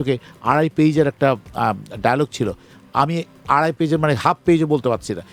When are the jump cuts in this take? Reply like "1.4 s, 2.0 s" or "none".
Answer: none